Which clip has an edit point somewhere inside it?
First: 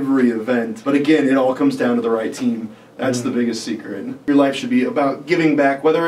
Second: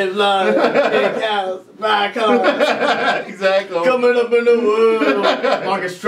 first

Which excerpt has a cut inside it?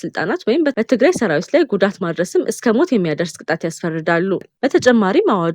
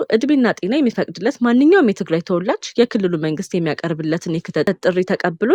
first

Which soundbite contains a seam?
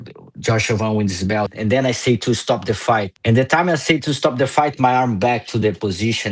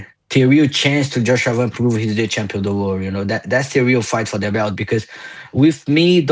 first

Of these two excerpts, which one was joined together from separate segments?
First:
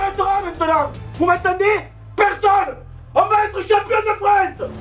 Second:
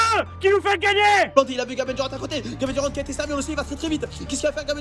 second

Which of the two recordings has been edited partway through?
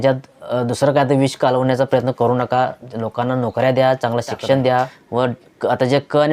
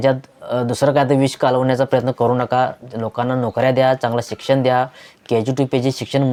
first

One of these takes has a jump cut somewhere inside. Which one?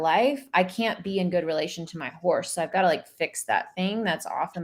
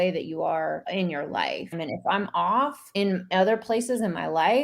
second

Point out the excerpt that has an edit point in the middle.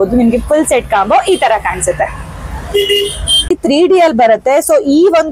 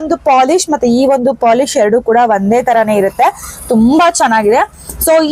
first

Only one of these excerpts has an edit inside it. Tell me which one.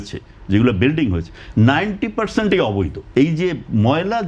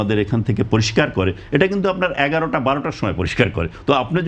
first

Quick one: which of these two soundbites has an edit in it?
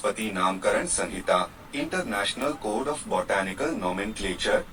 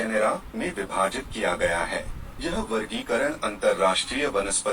second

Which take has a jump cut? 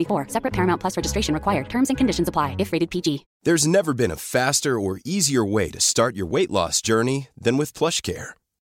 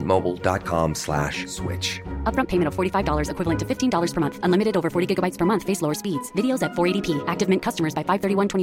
first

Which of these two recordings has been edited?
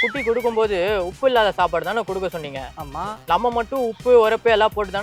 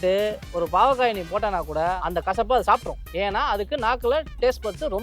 second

